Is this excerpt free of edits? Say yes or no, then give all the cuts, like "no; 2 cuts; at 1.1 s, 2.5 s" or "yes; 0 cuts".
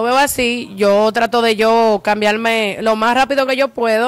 yes; 0 cuts